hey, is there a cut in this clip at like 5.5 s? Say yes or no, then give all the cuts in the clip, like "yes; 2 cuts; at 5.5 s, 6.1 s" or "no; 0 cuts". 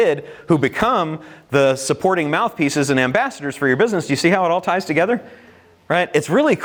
no; 0 cuts